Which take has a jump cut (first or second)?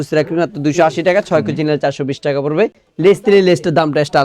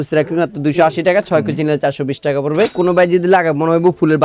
second